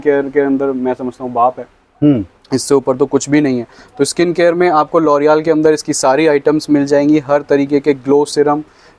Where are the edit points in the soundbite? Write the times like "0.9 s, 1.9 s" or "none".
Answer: none